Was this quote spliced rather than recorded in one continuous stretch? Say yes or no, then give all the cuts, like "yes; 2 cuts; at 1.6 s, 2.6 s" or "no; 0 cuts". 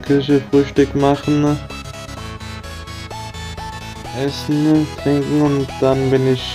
yes; 2 cuts; at 1.6 s, 3.9 s